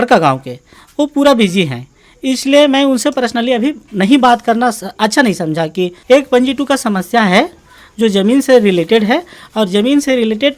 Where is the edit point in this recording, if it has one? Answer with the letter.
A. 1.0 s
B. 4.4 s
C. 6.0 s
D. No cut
C